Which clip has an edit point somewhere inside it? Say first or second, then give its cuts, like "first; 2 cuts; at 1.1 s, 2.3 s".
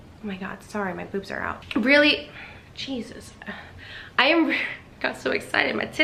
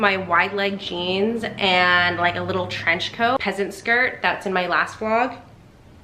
second; 1 cut; at 3.4 s